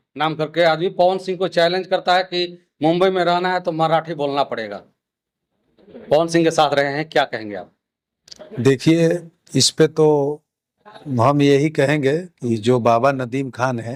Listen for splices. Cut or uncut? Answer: uncut